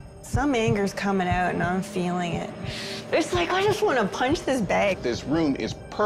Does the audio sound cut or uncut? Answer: cut